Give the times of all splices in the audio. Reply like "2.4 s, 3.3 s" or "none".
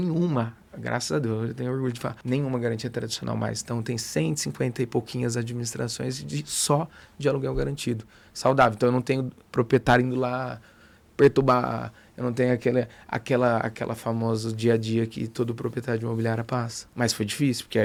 none